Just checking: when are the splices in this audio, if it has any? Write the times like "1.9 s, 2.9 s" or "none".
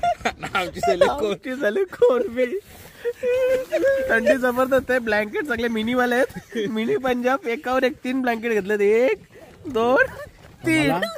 none